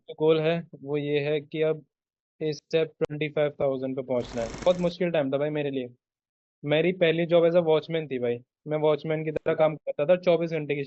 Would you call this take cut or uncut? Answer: cut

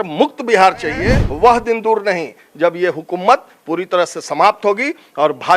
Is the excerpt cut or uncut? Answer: cut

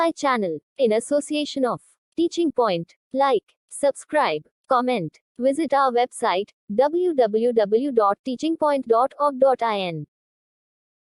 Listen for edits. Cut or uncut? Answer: uncut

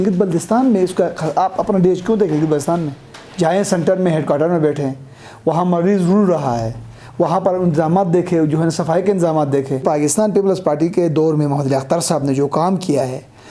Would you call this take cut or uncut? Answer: cut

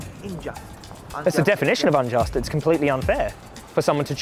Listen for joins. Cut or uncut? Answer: cut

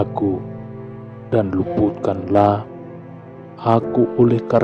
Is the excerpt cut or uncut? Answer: uncut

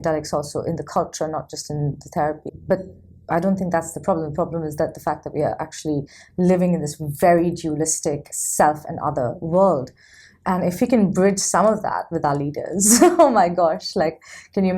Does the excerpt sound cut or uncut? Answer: cut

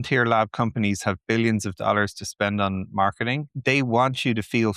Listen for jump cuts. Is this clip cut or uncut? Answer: cut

